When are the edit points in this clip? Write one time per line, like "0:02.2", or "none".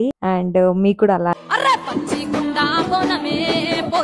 0:01.3